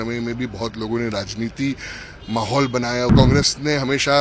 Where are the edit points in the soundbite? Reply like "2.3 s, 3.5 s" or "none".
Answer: 3.1 s